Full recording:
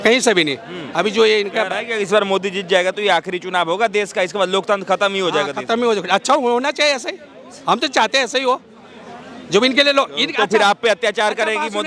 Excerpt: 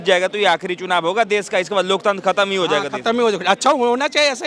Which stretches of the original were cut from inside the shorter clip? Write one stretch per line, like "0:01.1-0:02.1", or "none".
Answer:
none